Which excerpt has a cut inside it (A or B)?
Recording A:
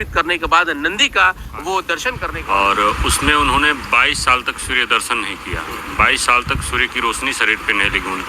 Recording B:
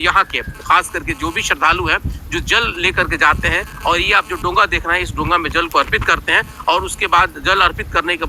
A